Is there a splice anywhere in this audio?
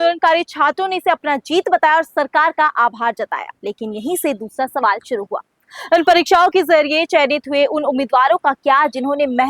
yes; 1 cut; at 3.5 s

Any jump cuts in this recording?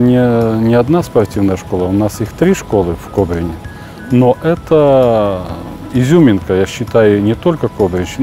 no; 0 cuts

